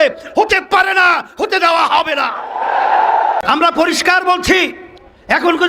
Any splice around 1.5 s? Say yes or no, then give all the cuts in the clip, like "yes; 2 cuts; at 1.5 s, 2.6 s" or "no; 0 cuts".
no; 1 cut; at 3.4 s